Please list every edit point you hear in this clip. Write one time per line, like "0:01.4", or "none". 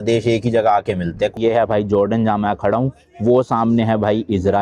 0:01.4